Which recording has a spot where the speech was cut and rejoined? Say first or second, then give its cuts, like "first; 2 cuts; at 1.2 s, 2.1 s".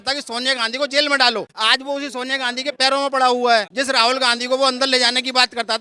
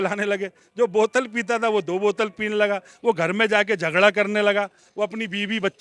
first; 1 cut; at 3.7 s